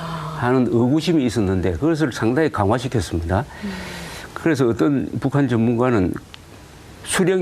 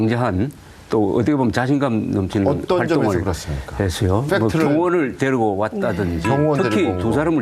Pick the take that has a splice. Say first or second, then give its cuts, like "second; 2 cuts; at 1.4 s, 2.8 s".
first; 1 cut; at 5.1 s